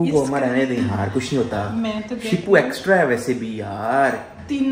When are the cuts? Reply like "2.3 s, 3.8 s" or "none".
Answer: none